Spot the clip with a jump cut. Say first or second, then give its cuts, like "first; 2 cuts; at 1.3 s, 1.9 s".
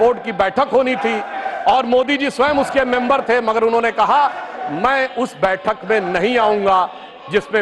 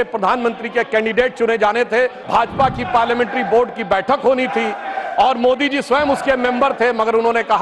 second; 1 cut; at 2.2 s